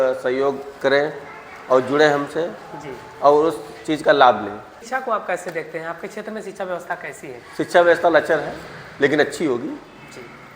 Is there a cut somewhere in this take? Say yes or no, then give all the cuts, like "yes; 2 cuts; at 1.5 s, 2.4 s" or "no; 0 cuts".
yes; 1 cut; at 4.8 s